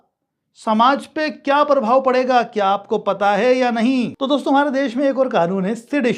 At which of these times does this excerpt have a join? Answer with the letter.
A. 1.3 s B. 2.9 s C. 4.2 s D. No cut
C